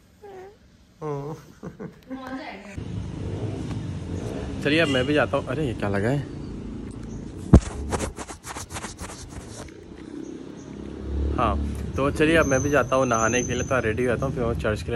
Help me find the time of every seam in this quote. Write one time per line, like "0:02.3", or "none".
none